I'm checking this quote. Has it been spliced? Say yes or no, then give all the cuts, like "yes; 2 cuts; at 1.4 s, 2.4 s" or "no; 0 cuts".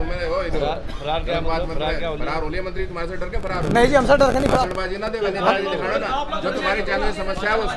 no; 0 cuts